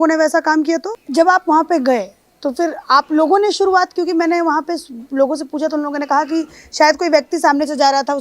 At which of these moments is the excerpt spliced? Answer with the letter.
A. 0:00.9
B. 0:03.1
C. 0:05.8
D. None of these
A